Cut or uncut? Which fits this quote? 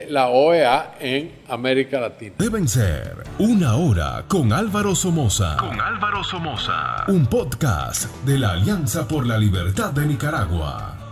cut